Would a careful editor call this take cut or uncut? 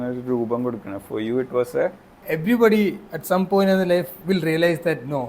cut